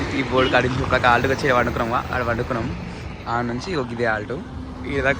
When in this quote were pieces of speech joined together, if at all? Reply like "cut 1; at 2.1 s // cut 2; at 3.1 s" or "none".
none